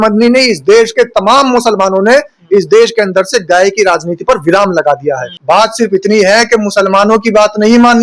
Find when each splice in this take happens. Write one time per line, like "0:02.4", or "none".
0:05.3

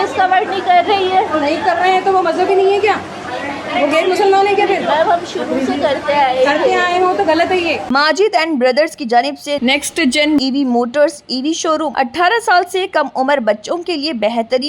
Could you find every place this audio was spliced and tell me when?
0:07.8
0:11.9

